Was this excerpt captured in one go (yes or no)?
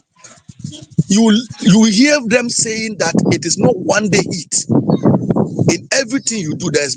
yes